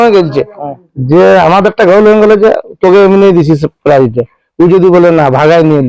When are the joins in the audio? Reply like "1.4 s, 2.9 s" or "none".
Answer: none